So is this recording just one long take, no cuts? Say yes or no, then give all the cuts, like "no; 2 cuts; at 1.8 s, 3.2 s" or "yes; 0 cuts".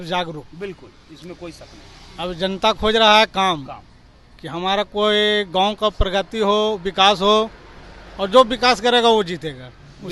yes; 0 cuts